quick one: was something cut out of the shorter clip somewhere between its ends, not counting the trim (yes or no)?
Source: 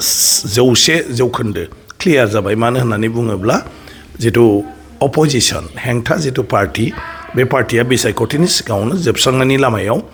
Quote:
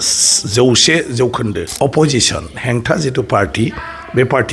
yes